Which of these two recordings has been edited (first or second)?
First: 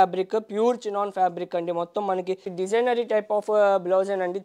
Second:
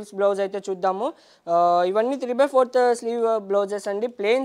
first